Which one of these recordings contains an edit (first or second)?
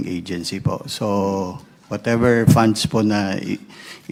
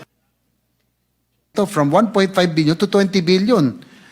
second